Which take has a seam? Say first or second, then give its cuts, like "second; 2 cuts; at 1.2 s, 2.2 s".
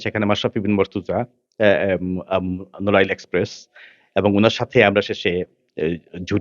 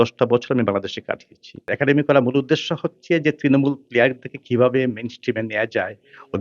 second; 1 cut; at 1.7 s